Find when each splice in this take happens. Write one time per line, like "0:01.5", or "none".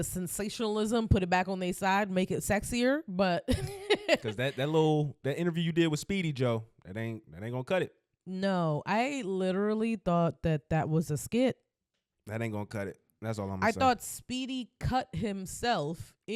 none